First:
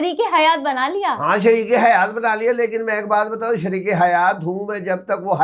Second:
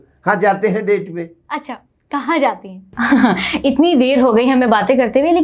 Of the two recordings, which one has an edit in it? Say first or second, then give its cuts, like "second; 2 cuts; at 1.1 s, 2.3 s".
second; 1 cut; at 2.9 s